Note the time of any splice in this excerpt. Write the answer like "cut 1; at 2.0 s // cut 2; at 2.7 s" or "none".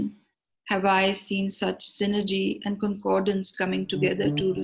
cut 1; at 3.5 s